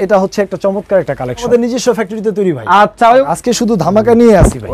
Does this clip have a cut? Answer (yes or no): yes